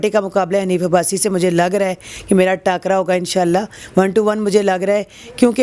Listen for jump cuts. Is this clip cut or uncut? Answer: uncut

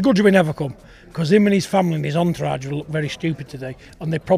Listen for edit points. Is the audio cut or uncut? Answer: uncut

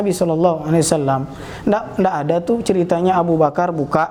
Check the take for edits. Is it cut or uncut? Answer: uncut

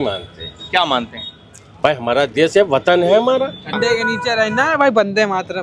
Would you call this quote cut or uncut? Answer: cut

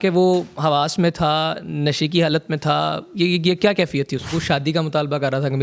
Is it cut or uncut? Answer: cut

